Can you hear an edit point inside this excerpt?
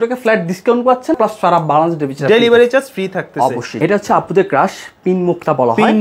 yes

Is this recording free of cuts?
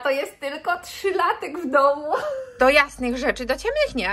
no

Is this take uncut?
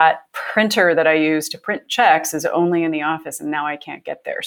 yes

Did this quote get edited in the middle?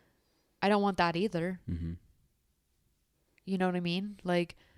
no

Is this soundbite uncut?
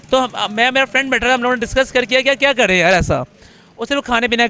yes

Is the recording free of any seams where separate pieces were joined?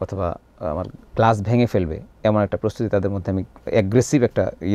yes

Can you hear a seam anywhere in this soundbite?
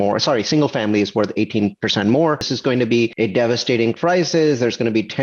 yes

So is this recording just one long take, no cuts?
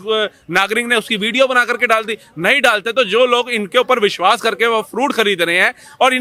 yes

